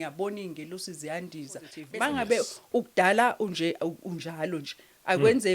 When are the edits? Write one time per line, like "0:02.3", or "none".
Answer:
0:01.8